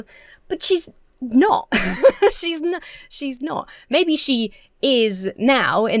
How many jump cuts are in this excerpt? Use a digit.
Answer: 0